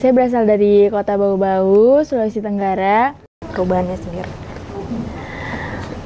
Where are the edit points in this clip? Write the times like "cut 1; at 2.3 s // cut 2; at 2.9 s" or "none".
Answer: cut 1; at 3.4 s